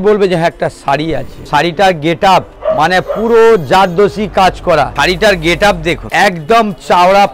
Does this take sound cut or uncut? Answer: cut